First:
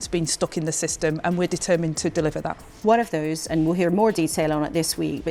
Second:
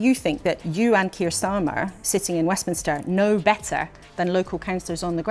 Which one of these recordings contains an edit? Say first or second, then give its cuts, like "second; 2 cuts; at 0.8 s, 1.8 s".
first; 1 cut; at 2.9 s